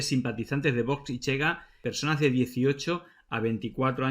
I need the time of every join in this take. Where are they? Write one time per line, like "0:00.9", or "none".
0:01.9